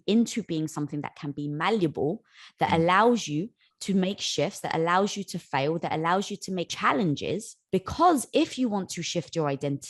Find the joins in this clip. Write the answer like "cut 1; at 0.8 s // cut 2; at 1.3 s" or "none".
cut 1; at 6.7 s // cut 2; at 7.5 s